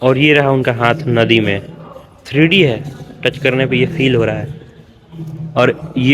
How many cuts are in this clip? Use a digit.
0